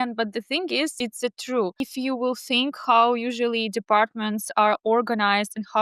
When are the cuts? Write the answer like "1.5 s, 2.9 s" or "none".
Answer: 0.9 s, 1.8 s